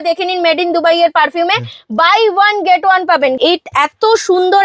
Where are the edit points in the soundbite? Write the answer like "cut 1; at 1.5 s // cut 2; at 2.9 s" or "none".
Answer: cut 1; at 3.4 s